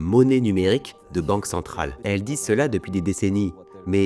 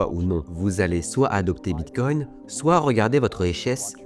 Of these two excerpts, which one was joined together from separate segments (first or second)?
first